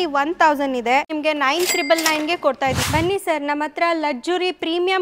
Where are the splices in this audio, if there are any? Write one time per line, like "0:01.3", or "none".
0:01.1
0:02.9